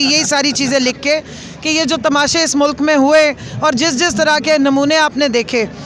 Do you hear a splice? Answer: no; 0 cuts

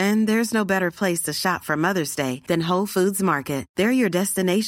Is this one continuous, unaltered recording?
yes; 0 cuts

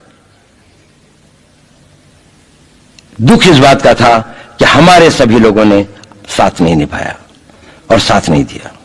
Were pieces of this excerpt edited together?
no; 0 cuts

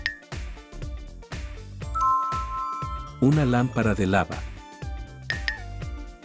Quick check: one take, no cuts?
yes; 0 cuts

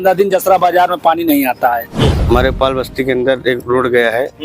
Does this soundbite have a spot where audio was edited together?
yes; 1 cut; at 2.2 s

